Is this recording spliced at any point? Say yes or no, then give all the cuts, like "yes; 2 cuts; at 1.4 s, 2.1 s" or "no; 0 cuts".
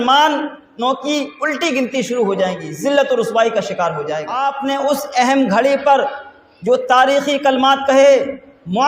yes; 1 cut; at 4.4 s